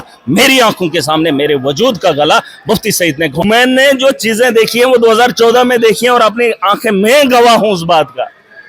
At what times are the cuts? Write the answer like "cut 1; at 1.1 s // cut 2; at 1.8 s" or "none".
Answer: cut 1; at 3.4 s